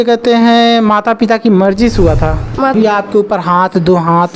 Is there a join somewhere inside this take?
yes; 1 cut; at 2.7 s

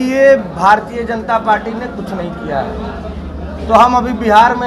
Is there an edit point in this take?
no; 0 cuts

